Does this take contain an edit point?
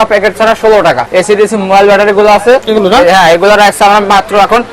yes; 2 cuts; at 1.0 s, 2.7 s

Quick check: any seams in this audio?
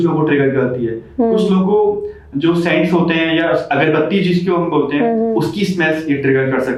no; 0 cuts

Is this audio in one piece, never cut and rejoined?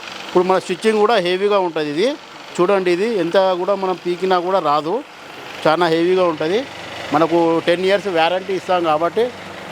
yes; 0 cuts

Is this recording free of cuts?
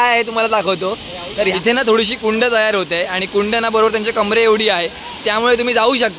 no; 1 cut; at 1.5 s

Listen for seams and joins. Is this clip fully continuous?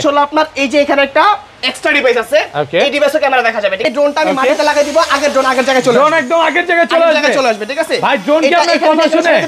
no; 1 cut; at 3.8 s

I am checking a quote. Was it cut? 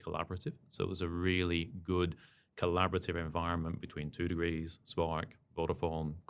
no; 0 cuts

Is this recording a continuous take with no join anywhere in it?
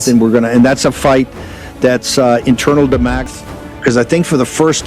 no; 1 cut; at 3.2 s

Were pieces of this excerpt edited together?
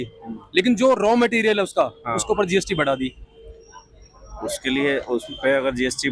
no; 0 cuts

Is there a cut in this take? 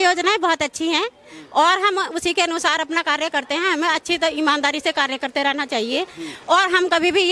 no; 0 cuts

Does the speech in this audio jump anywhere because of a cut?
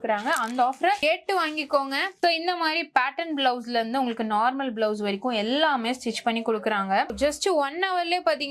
yes; 2 cuts; at 2.2 s, 7.1 s

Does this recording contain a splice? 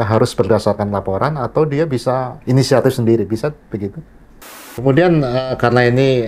yes; 2 cuts; at 2.3 s, 4.6 s

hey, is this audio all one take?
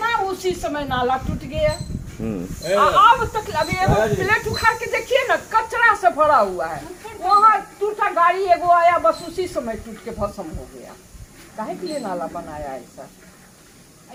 yes; 0 cuts

